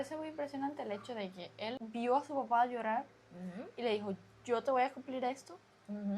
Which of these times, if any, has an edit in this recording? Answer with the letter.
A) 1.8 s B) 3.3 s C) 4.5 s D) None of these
A